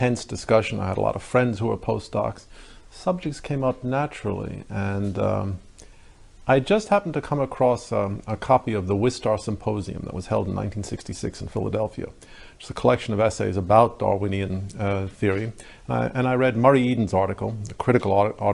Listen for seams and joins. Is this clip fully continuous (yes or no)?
no